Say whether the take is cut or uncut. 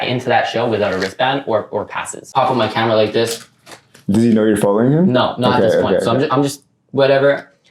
cut